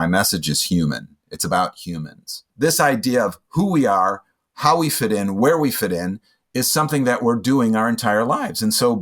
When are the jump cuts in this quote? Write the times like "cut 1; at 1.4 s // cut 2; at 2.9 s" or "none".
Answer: cut 1; at 2.5 s